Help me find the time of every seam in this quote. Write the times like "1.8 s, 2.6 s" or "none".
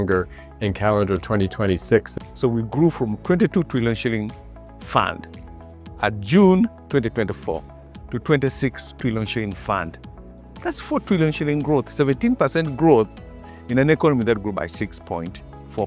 2.1 s, 10.3 s